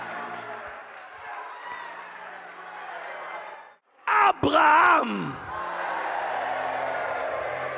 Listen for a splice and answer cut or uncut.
cut